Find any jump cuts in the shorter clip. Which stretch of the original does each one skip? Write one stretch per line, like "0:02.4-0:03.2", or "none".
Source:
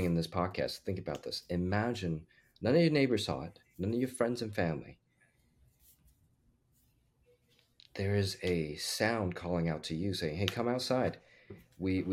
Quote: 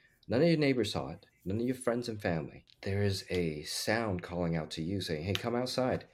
0:05.0-0:07.8

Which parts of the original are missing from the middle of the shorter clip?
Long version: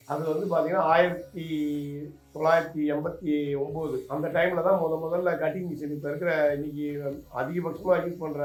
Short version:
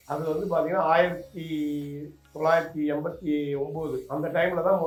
none

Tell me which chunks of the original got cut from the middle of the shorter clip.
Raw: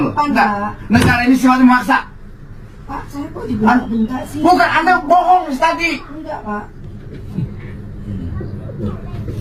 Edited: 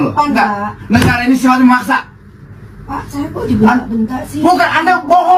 none

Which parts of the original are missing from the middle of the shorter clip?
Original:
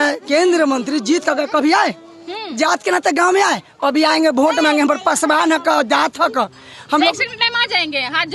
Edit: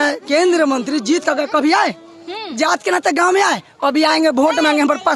none

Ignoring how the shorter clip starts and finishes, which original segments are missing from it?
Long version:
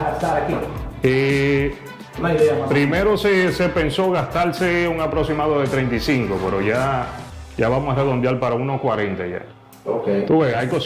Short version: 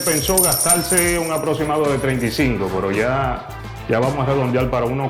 none

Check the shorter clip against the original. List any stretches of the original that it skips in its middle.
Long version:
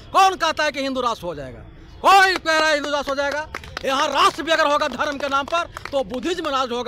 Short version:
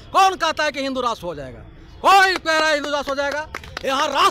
none

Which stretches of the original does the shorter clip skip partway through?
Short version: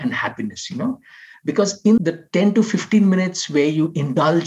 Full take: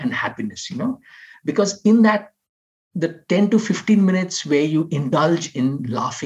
0:02.0-0:02.9

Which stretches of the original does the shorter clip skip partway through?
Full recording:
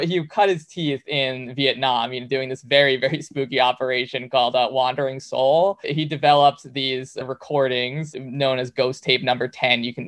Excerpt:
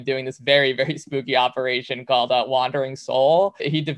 none

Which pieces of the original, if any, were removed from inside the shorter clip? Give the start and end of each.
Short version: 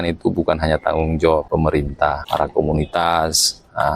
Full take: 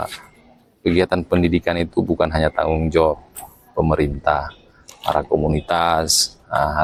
0:03.5-0:04.6

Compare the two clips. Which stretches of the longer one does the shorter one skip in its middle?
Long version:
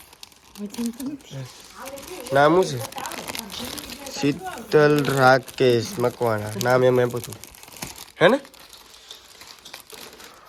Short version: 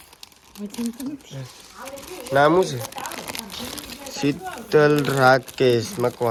none

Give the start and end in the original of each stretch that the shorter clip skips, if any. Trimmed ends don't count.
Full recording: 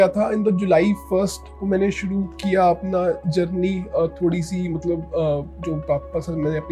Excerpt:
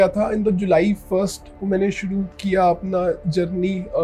none

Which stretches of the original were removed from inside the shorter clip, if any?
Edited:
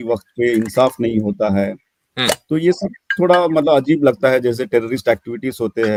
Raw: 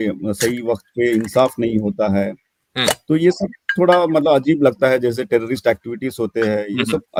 none

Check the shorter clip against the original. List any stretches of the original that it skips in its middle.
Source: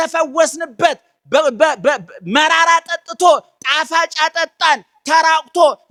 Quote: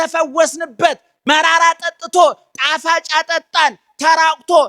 0:01.1-0:02.2

